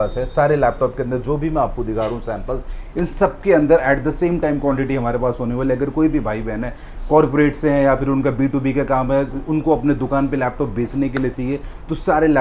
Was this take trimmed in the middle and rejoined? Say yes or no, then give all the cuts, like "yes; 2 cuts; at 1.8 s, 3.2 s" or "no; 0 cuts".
no; 0 cuts